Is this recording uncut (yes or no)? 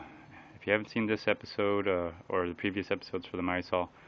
no